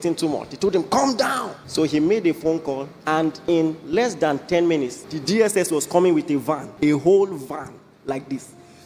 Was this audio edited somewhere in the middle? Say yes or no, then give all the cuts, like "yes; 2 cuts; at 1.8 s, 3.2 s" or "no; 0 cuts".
yes; 4 cuts; at 1.5 s, 2.9 s, 5.1 s, 6.7 s